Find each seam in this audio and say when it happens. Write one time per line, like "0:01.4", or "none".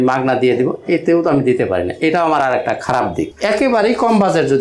0:03.3